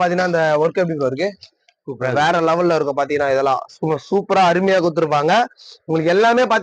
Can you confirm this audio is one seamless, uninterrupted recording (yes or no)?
yes